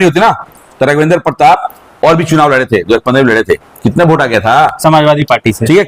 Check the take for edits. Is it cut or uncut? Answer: uncut